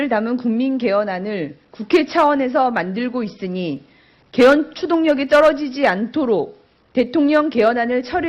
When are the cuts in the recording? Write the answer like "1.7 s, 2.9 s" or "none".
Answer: 2.1 s

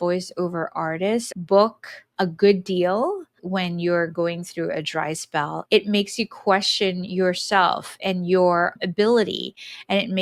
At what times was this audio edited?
1.3 s, 3.3 s, 5.6 s, 8.7 s

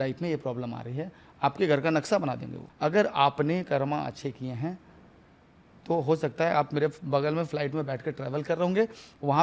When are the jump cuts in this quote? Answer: 2.6 s

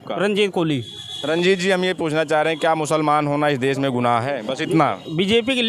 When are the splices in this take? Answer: none

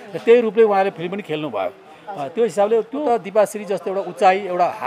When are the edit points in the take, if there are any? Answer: 3.0 s

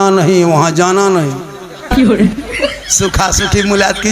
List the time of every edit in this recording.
1.8 s, 2.9 s

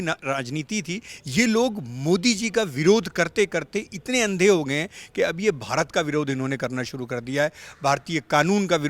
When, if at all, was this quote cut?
1.1 s

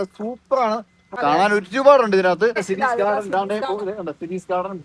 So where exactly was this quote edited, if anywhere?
1.1 s, 2.7 s

